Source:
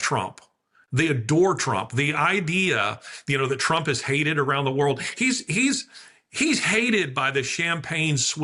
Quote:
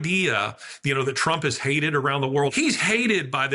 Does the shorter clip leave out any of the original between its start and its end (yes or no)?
yes